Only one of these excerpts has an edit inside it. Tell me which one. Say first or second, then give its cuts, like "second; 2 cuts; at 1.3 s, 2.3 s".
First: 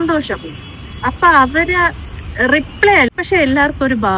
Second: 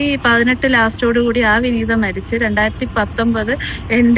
first; 1 cut; at 3.2 s